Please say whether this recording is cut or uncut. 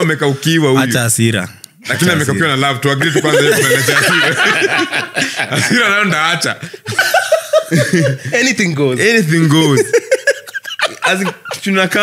cut